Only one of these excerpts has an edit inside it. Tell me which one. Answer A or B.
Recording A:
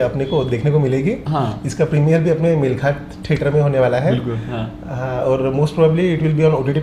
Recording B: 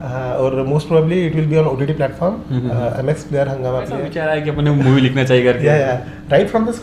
B